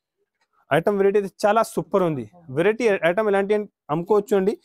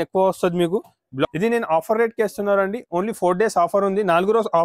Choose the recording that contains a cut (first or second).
second